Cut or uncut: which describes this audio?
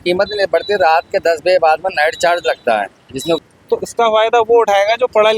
cut